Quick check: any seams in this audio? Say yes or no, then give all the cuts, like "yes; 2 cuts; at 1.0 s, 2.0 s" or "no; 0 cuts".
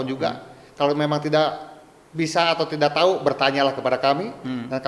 no; 0 cuts